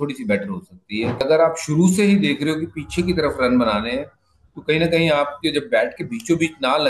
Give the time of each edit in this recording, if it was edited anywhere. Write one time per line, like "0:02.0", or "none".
0:01.2